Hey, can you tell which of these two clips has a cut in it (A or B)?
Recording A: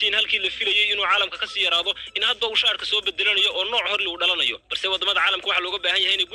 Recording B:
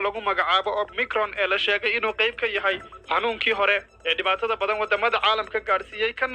B